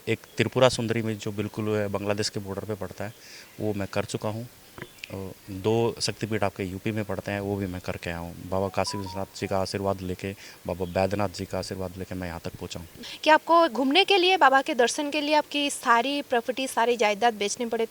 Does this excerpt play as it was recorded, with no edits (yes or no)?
no